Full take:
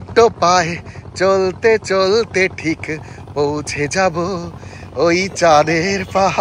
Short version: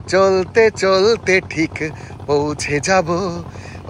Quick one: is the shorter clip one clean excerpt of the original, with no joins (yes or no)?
yes